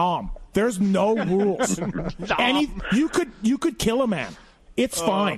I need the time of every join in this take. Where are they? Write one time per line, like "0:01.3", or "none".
none